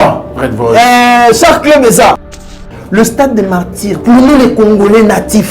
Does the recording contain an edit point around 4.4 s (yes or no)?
no